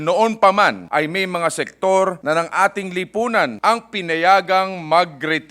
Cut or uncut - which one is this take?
cut